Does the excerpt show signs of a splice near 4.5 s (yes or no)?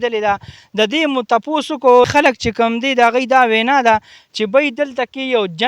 no